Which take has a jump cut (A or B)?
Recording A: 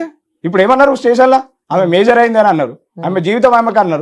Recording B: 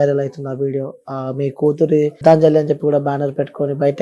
B